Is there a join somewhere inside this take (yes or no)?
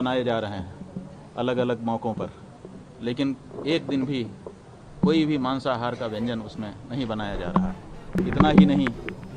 yes